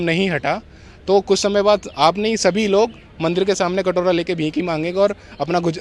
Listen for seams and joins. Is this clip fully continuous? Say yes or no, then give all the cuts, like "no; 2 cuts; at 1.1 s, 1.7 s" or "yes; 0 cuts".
yes; 0 cuts